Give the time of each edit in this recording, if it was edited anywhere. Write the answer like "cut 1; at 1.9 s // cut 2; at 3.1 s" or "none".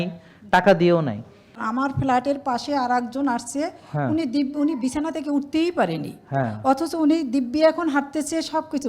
cut 1; at 1.6 s